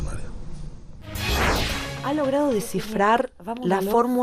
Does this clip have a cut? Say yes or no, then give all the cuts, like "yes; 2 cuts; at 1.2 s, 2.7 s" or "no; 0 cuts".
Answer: yes; 1 cut; at 1.7 s